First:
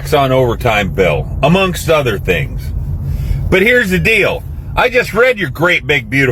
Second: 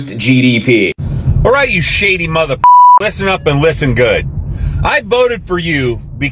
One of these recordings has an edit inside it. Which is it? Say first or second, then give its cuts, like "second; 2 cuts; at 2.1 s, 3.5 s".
second; 1 cut; at 1.0 s